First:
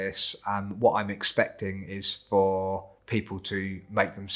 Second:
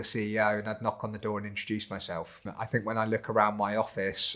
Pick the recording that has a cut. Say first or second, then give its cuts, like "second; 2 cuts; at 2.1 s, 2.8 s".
second; 1 cut; at 2.5 s